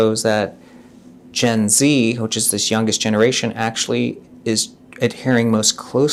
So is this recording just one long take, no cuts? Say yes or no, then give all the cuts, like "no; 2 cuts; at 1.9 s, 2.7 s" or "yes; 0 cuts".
yes; 0 cuts